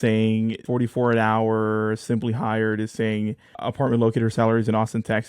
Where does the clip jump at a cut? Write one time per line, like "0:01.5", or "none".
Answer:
0:03.6

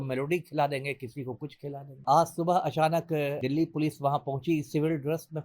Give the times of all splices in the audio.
0:02.0
0:03.4

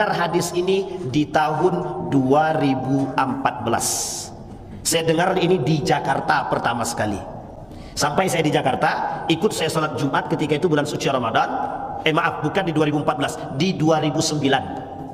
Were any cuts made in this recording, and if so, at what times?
none

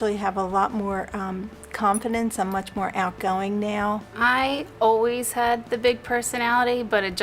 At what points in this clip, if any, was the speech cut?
none

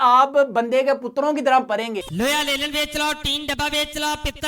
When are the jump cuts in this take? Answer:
0:02.0

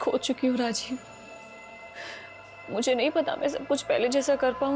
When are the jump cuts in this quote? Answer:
none

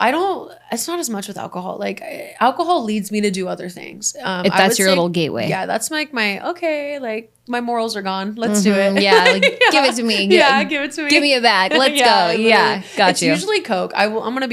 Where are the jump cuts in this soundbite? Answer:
none

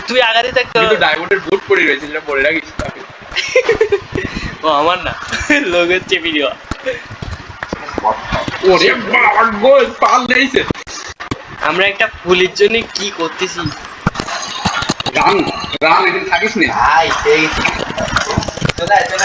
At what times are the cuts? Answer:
0:07.8

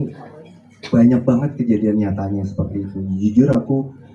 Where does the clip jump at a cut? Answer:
none

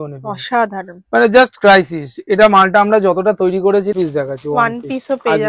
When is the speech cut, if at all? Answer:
0:03.9

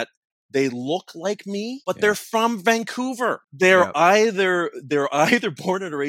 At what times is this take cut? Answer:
0:01.8
0:03.5

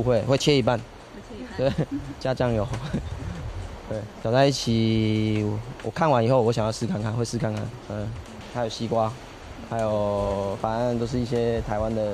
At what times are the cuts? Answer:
0:04.1
0:08.4

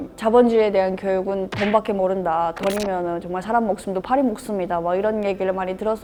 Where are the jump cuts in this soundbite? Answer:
none

